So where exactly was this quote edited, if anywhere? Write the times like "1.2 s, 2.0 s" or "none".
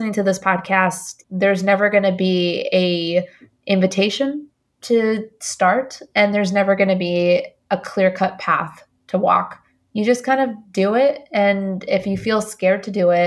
1.1 s